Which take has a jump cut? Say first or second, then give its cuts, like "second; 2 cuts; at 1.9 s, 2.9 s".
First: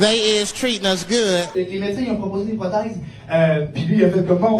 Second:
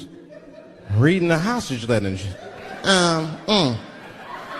first; 1 cut; at 1.5 s